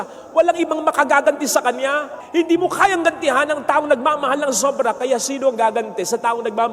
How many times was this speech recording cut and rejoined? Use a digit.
1